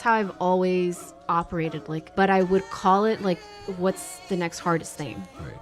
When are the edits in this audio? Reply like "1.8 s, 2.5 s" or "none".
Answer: 1.9 s